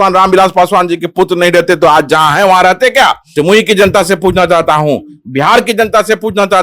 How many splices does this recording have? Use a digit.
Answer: 1